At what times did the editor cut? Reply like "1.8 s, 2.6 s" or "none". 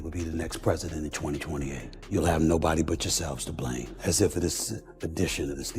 1.9 s, 3.9 s